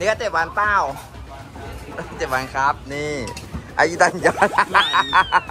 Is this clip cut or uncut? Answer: uncut